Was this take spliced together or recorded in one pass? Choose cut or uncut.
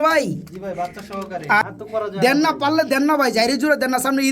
cut